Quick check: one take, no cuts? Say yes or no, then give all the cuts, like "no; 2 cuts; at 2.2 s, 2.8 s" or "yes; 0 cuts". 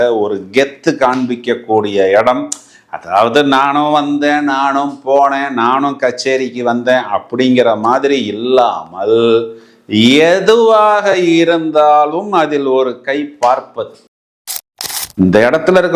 no; 1 cut; at 14.5 s